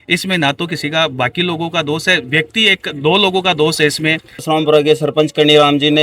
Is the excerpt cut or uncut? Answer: cut